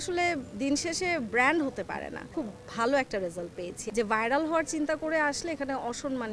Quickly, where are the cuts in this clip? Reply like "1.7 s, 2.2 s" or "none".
2.3 s, 3.8 s